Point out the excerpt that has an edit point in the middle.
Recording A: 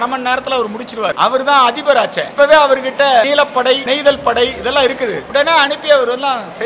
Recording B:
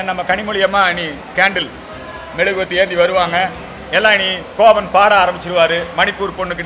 A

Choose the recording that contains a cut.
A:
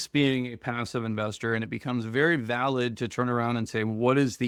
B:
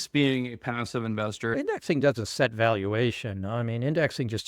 B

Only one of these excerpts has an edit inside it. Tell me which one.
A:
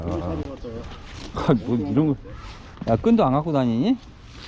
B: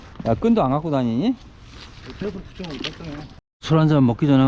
B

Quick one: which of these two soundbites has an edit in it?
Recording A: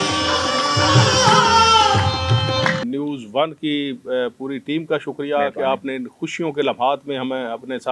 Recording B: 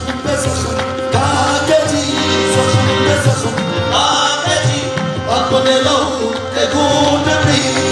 A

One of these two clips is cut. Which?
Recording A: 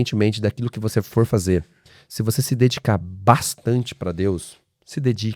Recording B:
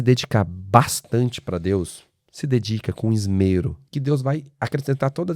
B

